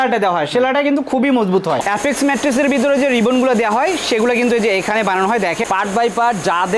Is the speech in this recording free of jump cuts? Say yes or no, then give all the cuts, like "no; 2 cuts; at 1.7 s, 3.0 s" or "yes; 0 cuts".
no; 2 cuts; at 1.8 s, 5.6 s